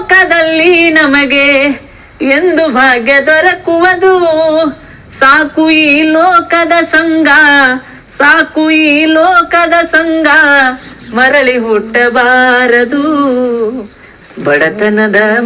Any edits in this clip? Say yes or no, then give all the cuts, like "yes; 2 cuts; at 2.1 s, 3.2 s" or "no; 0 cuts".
yes; 1 cut; at 14.1 s